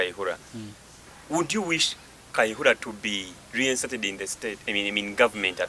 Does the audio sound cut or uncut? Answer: uncut